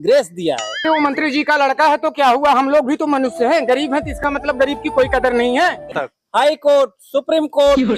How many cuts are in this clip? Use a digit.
1